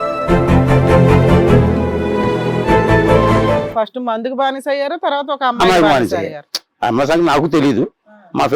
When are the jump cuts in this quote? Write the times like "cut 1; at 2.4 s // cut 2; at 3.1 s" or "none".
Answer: cut 1; at 3.6 s